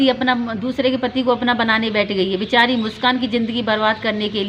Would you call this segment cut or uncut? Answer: uncut